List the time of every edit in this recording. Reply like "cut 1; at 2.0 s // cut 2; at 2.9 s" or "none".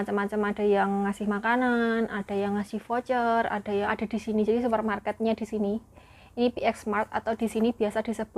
cut 1; at 3.9 s